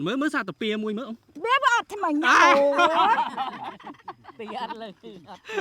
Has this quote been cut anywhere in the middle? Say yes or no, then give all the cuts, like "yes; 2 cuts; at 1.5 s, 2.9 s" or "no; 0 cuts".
no; 0 cuts